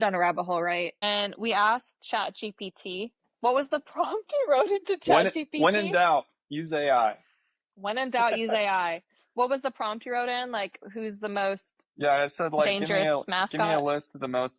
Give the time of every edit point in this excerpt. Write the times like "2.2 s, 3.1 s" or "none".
1.0 s